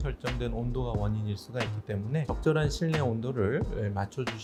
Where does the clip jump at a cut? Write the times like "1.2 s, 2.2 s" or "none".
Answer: none